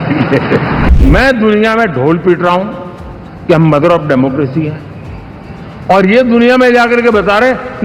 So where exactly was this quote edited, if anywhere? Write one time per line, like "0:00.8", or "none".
0:00.9